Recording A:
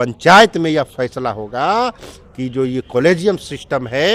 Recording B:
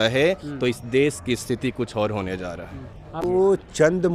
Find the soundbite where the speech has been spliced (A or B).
B